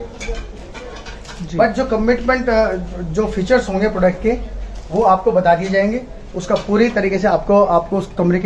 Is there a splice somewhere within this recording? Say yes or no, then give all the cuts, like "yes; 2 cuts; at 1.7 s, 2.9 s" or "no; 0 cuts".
no; 0 cuts